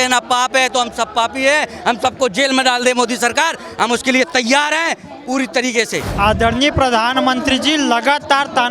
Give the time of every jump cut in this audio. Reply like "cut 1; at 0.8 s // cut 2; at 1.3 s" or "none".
cut 1; at 6.1 s